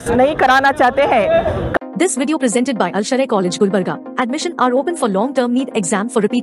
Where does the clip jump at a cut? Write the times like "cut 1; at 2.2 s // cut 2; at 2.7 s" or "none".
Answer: cut 1; at 1.7 s